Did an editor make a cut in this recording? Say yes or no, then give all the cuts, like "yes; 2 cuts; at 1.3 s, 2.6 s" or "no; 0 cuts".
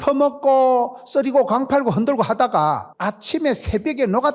yes; 1 cut; at 2.9 s